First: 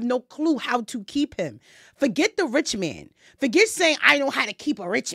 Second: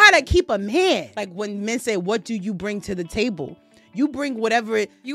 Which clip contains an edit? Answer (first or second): second